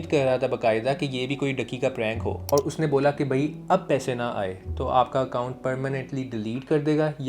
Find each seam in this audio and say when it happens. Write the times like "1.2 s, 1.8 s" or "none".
2.5 s